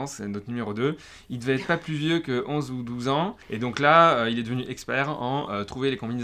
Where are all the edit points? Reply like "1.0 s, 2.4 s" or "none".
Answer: none